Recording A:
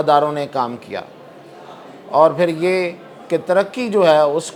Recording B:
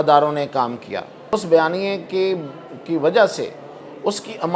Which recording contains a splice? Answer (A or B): B